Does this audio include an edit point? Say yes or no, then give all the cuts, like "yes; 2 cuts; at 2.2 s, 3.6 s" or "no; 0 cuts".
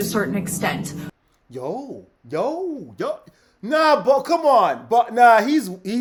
no; 0 cuts